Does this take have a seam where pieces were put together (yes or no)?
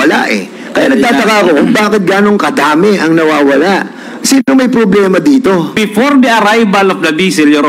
yes